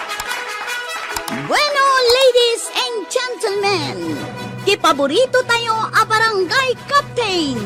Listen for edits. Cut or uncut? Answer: uncut